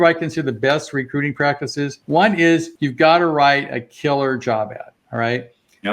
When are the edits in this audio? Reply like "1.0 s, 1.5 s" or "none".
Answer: 2.0 s, 2.8 s